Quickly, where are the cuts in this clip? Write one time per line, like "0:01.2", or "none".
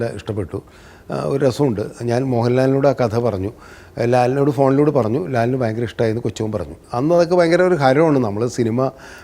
0:06.8